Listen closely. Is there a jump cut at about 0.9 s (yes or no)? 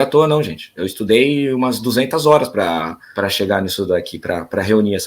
no